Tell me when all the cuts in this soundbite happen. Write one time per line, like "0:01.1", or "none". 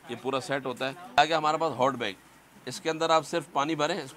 0:01.2